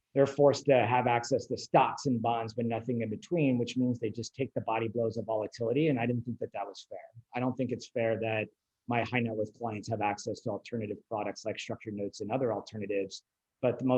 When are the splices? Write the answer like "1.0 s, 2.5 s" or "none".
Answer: none